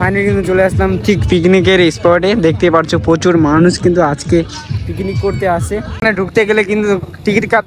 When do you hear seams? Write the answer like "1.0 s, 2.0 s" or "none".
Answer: 5.8 s